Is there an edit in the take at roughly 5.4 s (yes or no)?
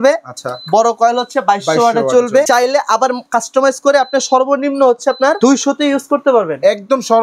yes